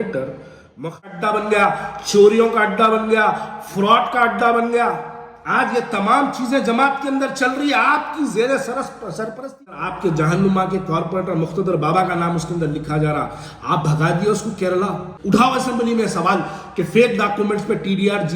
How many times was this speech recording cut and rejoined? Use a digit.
3